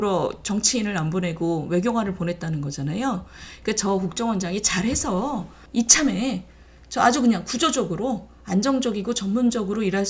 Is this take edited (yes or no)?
yes